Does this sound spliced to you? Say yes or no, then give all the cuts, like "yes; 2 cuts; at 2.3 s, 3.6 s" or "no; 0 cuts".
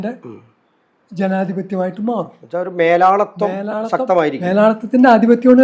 no; 0 cuts